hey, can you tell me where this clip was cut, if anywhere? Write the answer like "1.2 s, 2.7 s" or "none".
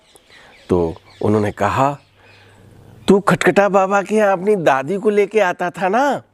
none